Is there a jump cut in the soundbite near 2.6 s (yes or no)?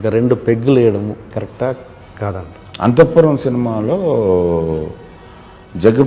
yes